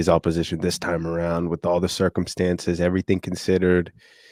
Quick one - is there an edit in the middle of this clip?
no; 0 cuts

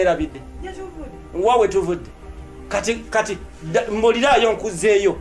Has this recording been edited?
no; 0 cuts

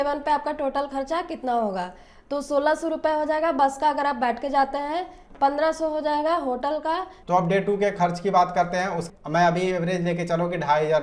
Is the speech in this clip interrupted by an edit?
yes; 2 cuts; at 7.1 s, 9.0 s

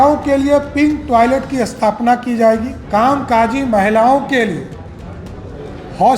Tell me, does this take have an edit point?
yes; 1 cut; at 2.8 s

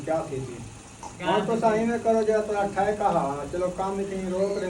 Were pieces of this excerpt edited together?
yes; 1 cut; at 1.2 s

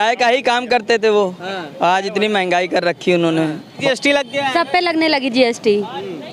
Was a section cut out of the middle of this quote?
yes; 1 cut; at 3.8 s

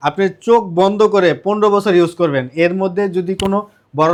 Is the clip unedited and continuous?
yes; 0 cuts

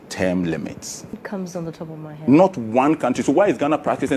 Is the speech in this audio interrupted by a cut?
yes; 1 cut; at 1.2 s

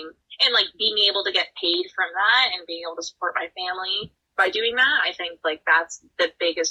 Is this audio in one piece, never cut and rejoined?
yes; 0 cuts

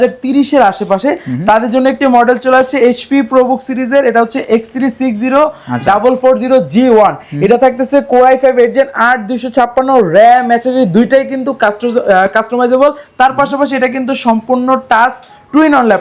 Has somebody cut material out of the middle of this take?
no; 0 cuts

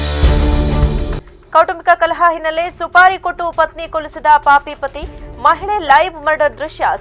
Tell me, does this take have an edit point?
no; 0 cuts

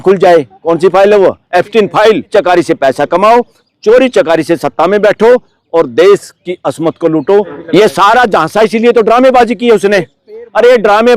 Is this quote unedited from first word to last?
no; 2 cuts; at 2.3 s, 7.6 s

